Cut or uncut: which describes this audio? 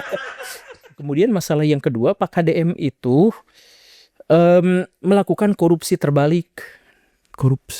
cut